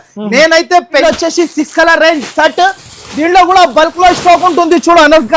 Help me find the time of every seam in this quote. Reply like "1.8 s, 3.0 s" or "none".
1.0 s